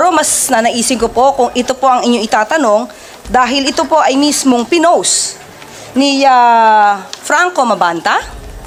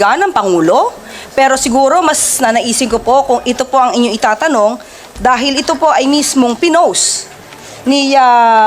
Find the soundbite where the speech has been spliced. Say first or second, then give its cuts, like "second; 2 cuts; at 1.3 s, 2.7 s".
second; 1 cut; at 1.0 s